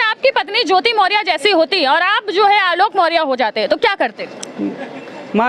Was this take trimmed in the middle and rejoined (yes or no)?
no